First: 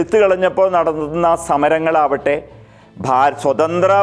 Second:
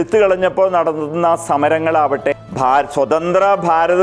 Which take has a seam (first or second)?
second